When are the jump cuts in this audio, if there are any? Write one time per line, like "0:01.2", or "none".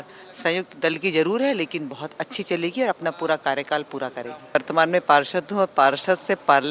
0:04.6